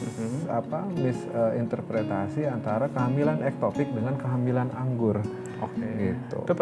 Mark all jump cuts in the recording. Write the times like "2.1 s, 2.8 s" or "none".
none

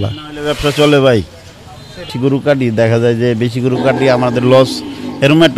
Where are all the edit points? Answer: 2.1 s

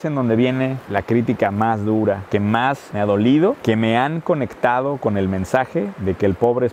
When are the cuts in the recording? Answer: none

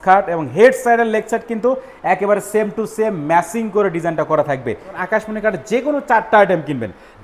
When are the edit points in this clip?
5.0 s

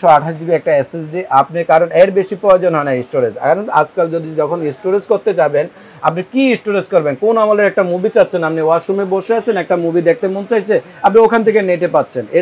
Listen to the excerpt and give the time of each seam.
none

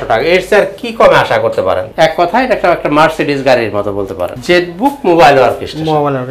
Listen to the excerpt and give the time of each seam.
1.9 s, 4.2 s

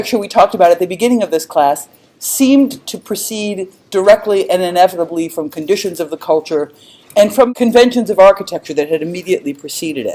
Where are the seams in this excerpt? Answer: none

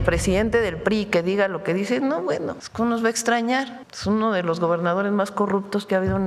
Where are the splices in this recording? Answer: 2.6 s, 3.8 s

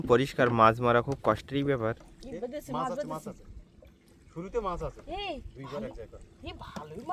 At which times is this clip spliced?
none

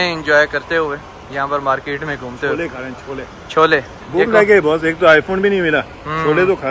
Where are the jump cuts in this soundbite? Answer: none

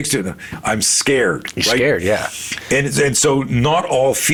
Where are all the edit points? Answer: none

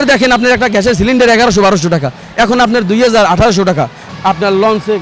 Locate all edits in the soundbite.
4.1 s

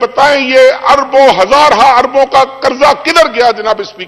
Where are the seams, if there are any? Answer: none

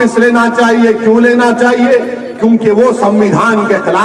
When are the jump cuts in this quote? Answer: none

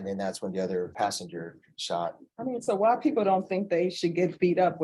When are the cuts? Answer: 0.9 s

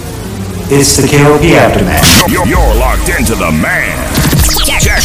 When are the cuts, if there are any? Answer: none

